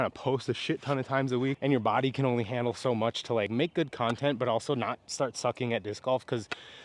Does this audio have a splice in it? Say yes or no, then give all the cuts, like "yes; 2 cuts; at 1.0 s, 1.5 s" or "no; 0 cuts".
no; 0 cuts